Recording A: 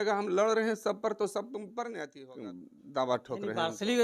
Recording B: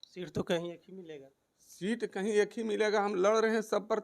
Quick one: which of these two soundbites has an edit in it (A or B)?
A